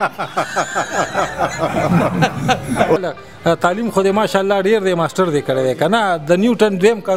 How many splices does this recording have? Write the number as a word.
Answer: one